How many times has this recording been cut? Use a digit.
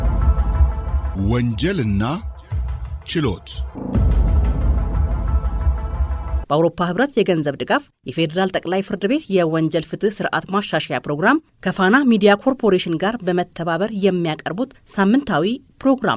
3